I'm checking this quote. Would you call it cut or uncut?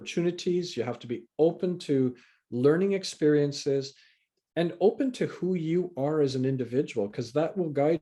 uncut